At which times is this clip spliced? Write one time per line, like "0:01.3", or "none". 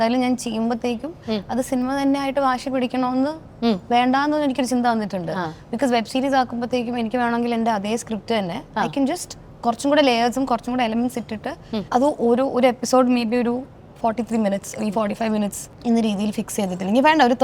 none